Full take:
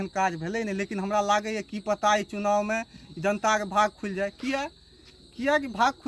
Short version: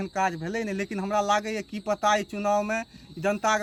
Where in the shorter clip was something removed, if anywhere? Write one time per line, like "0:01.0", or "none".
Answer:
none